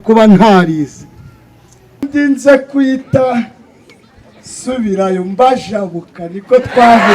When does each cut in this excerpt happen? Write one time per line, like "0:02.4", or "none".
0:02.1